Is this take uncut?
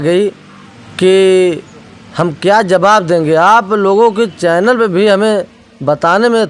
yes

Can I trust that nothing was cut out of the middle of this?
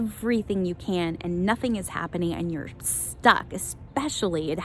yes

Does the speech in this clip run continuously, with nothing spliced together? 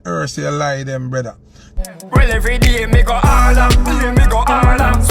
no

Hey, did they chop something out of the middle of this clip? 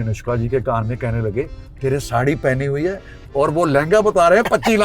no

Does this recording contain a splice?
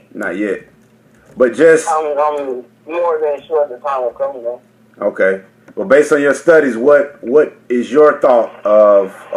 no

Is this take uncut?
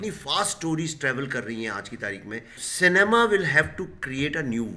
no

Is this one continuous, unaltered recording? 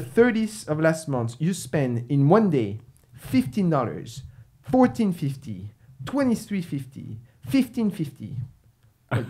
yes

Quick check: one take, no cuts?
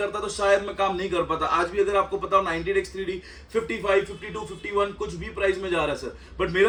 yes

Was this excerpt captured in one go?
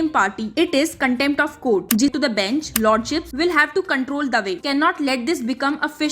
no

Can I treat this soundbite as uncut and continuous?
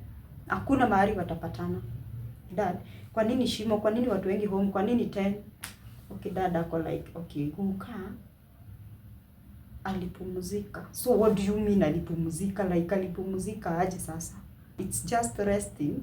no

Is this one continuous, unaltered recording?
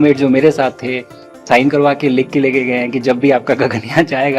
no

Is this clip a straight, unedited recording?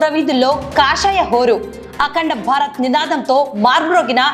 yes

